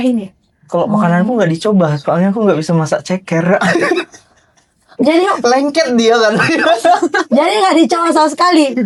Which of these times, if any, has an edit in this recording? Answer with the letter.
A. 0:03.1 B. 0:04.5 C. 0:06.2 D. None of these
D